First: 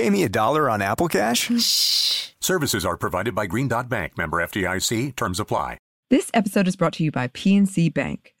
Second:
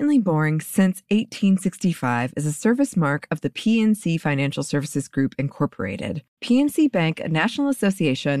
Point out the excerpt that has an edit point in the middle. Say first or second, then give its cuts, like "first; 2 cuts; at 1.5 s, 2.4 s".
first; 1 cut; at 5.9 s